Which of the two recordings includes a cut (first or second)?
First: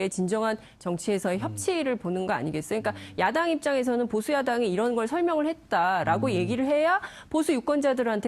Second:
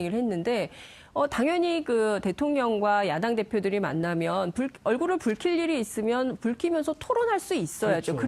second